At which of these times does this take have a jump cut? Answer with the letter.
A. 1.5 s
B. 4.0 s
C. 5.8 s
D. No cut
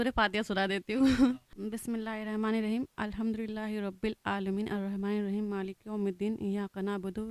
A